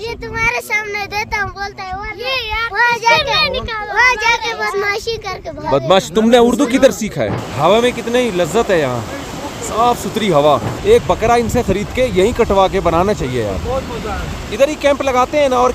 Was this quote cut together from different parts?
yes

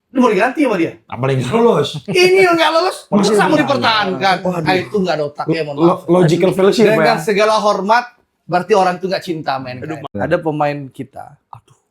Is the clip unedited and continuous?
no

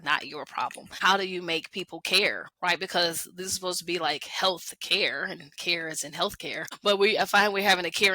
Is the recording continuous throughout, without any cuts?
no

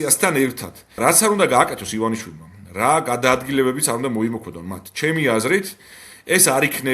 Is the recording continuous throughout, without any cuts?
no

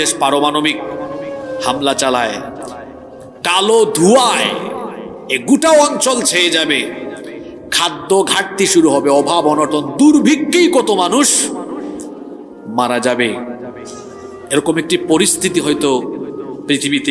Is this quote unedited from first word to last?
yes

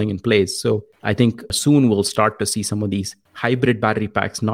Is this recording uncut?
no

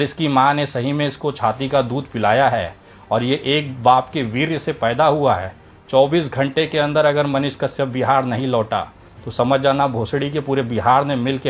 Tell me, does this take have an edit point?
no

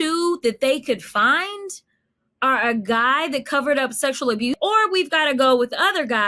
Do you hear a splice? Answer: yes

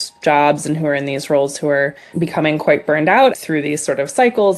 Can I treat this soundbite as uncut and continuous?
no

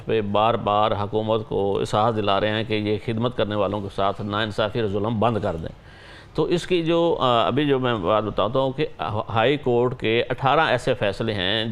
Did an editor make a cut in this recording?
no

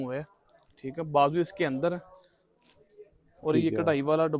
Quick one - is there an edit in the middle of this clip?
no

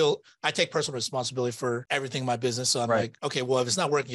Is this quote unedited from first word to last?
no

